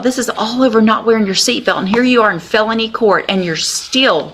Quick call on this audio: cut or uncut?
uncut